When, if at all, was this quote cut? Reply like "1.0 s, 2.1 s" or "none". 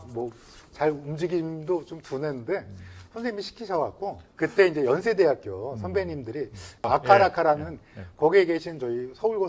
4.2 s